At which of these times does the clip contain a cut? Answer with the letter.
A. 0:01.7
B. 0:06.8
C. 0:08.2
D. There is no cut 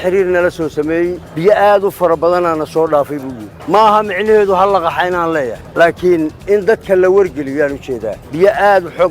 C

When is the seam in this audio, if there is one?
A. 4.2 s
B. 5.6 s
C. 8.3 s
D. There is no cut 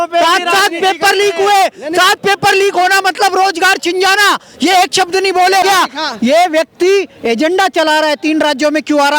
B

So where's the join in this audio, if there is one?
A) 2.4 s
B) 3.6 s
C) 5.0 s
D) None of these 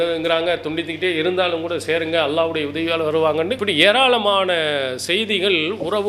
B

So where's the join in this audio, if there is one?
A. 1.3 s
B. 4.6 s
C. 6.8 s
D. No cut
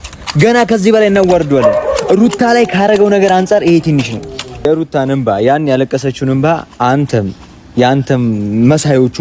B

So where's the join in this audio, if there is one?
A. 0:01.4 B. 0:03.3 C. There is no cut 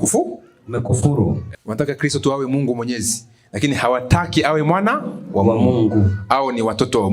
A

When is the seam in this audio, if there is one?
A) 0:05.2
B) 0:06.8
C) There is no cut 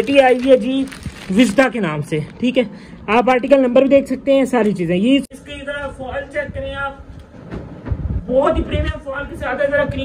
A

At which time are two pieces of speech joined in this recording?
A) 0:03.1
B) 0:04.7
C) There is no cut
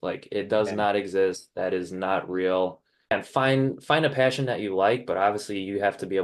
A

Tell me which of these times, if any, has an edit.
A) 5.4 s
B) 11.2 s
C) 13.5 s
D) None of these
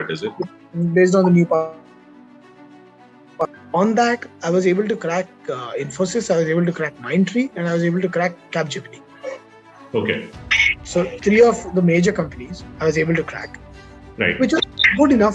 B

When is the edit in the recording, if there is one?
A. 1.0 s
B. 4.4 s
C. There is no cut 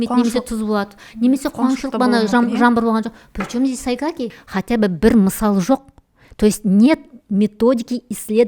B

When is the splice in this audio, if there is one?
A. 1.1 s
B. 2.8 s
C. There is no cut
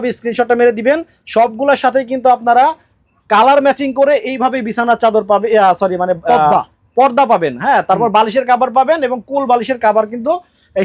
C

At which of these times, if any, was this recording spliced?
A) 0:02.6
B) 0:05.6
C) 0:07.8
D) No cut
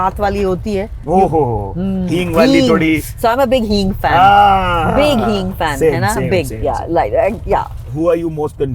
C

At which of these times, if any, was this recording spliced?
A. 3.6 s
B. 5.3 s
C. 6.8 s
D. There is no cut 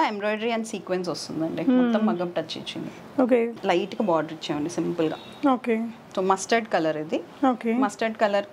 A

